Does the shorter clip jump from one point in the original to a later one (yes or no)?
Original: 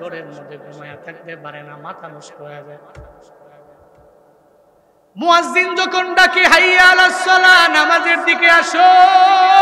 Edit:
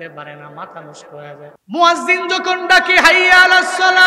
yes